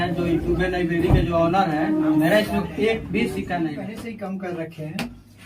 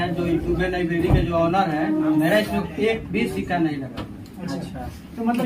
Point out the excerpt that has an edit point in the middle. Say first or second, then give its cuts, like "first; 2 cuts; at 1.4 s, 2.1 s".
first; 1 cut; at 4.0 s